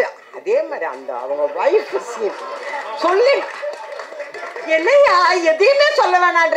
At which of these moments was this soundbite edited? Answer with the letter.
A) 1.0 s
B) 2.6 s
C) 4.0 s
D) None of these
D